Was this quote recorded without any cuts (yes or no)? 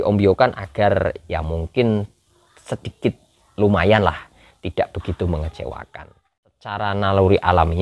no